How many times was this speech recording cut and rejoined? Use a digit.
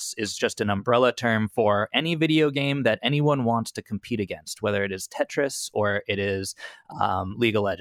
0